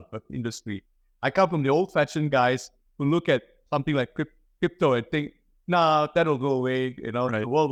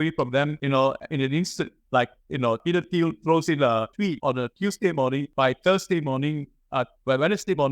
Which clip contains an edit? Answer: second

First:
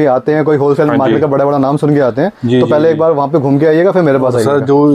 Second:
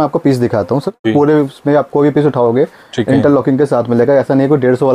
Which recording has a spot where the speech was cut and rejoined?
second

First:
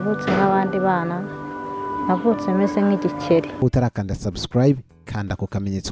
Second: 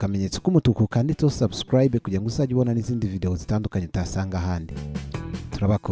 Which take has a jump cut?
first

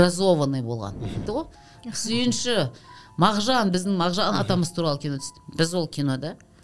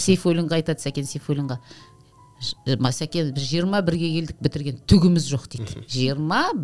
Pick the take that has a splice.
first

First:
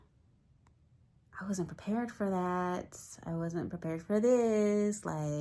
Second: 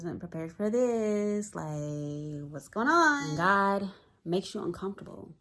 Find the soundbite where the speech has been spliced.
second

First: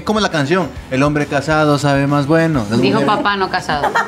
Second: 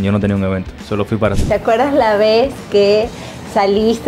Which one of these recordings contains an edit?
second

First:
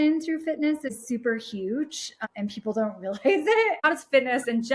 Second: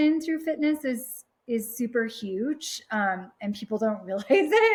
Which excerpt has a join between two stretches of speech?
first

